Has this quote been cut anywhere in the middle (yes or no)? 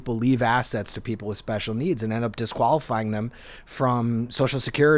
no